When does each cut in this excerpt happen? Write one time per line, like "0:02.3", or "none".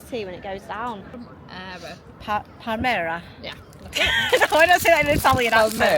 0:01.1